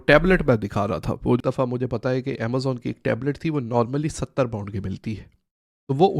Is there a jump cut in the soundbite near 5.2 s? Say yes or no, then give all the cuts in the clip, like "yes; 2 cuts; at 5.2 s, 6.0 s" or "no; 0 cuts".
no; 1 cut; at 1.4 s